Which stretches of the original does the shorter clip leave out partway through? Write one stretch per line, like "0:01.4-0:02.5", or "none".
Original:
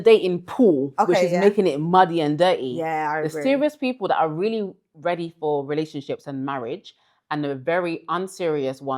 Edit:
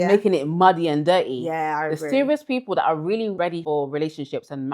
0:04.9-0:05.3